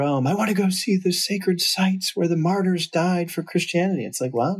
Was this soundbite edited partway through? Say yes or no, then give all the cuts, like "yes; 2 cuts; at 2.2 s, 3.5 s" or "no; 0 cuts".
no; 0 cuts